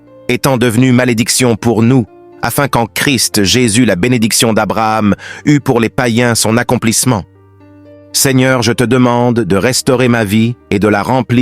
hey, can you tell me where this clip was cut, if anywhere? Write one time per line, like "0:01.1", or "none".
0:07.6